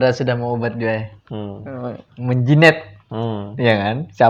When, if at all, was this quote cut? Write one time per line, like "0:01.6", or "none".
none